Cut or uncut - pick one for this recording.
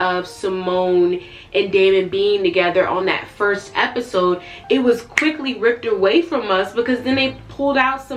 uncut